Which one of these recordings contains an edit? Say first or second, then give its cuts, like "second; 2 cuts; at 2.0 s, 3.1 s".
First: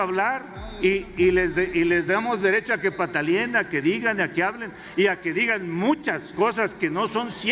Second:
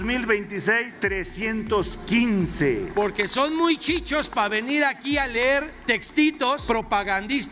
second; 4 cuts; at 0.9 s, 2.9 s, 5.7 s, 6.6 s